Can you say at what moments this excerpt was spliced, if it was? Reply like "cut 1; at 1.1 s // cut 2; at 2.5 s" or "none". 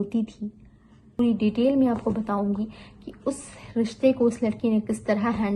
cut 1; at 1.1 s